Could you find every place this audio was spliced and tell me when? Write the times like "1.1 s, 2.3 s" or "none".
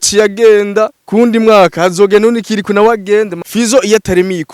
1.0 s, 3.4 s

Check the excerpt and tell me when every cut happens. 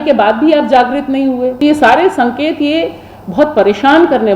1.6 s

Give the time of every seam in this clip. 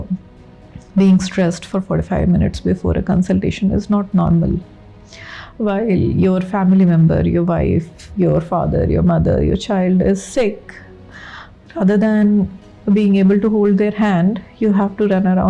none

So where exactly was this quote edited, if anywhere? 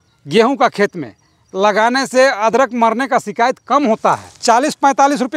4.3 s

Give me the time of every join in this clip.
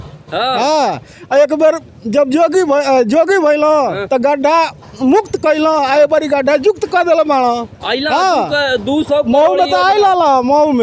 none

